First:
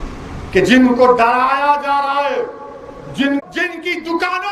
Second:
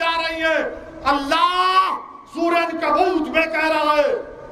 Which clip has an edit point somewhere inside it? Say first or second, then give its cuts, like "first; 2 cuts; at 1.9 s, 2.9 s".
first; 1 cut; at 3.4 s